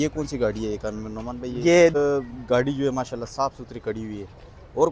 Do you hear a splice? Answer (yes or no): yes